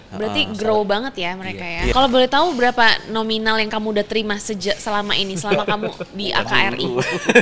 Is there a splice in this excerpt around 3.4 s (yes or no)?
no